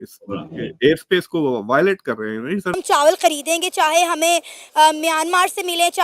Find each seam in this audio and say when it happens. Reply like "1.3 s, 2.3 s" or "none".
2.7 s